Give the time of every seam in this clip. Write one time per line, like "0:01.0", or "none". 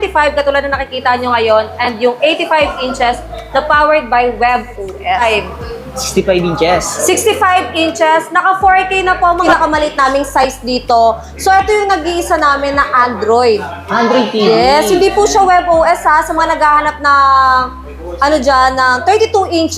0:05.2
0:09.4